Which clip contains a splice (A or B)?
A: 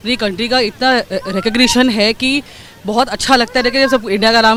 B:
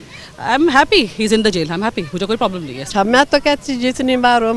B